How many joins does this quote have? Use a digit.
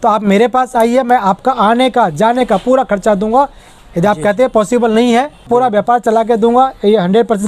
0